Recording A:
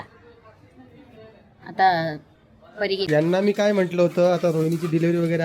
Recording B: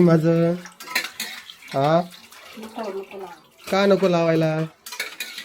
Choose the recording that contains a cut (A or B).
A